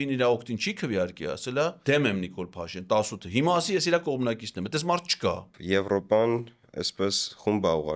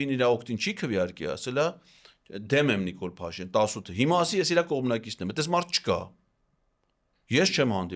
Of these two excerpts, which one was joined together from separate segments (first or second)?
first